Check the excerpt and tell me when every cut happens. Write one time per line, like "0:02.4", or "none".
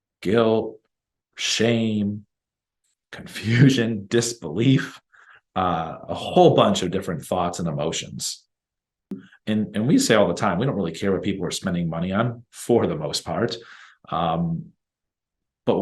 0:09.3